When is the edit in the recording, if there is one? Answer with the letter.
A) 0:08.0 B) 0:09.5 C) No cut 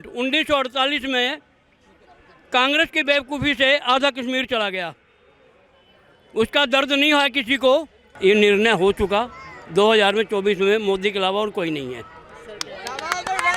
A